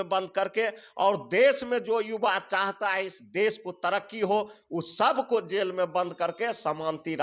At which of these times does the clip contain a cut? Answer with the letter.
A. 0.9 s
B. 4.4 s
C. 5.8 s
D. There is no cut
D